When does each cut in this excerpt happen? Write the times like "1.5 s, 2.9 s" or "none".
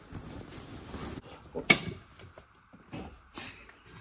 1.2 s